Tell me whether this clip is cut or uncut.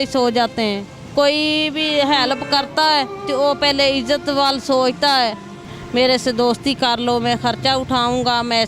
cut